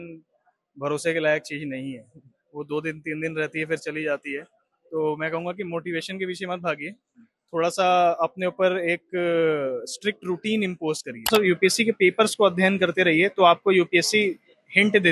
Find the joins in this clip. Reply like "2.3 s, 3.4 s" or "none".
11.3 s